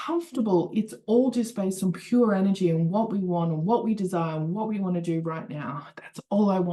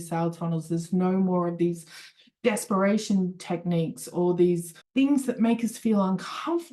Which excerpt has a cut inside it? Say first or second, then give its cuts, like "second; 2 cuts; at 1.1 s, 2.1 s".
second; 1 cut; at 4.8 s